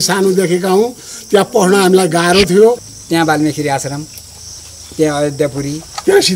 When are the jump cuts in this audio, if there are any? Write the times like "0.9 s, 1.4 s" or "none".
2.9 s